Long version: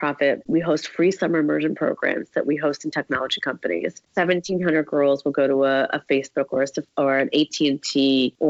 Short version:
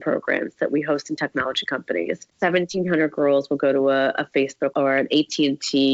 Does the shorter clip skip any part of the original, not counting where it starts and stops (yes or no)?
yes